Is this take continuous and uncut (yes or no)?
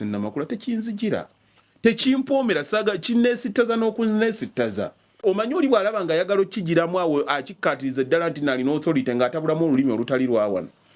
no